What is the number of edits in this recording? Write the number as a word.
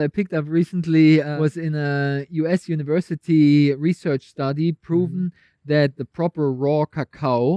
one